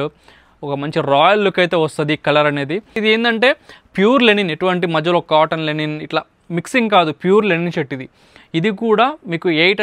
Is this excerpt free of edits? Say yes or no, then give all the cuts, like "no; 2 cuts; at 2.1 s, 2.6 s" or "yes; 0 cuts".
yes; 0 cuts